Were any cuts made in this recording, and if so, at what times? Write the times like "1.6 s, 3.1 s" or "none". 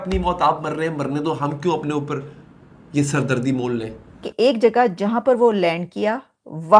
4.3 s